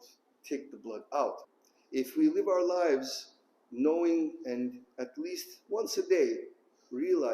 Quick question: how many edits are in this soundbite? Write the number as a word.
one